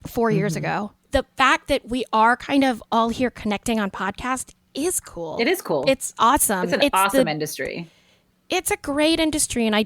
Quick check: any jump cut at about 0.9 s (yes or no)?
yes